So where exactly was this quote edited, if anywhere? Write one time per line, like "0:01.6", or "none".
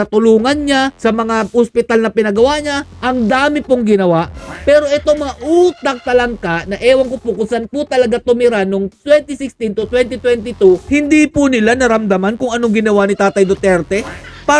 0:00.9
0:02.9